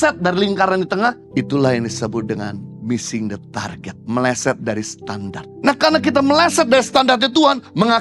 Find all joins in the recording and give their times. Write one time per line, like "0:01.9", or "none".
0:01.2
0:03.9
0:05.4